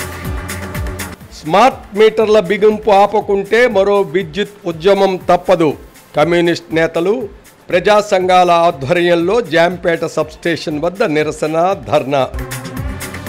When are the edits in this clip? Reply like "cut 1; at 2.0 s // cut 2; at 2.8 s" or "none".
none

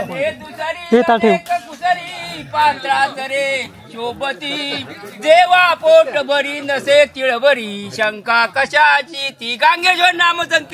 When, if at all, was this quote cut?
none

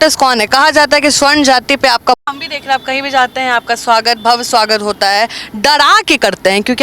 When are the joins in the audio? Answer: cut 1; at 2.2 s

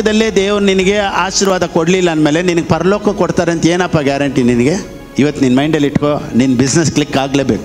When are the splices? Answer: cut 1; at 5.0 s

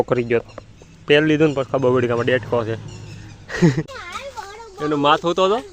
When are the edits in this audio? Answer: cut 1; at 4.0 s

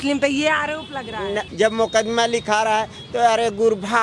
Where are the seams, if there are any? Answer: cut 1; at 1.5 s

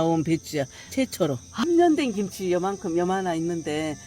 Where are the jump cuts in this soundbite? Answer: cut 1; at 1.5 s

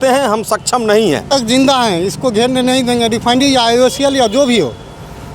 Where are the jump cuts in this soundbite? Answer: cut 1; at 1.2 s

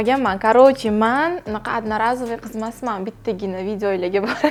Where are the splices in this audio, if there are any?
none

